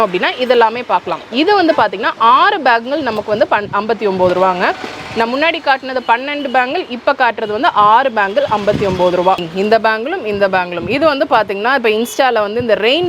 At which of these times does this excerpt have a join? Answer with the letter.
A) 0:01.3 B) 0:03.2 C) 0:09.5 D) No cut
C